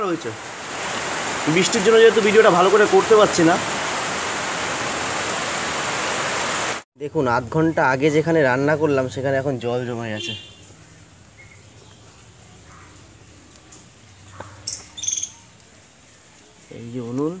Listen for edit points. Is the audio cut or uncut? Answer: cut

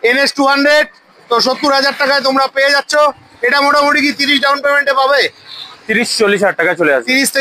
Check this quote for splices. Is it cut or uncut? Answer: uncut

